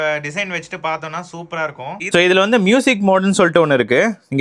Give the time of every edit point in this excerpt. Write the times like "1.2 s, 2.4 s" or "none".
2.0 s